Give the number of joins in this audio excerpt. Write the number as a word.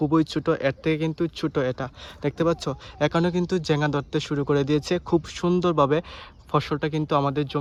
zero